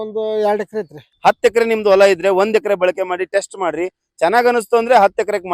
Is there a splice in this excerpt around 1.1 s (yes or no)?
yes